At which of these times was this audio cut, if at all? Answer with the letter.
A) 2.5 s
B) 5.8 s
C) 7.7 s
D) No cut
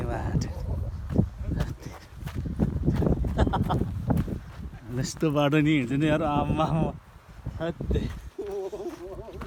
D